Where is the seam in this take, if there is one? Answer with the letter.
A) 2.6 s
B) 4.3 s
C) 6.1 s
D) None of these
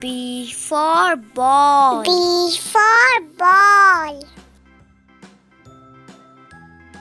B